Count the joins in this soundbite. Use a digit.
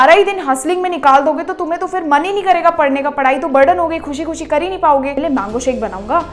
1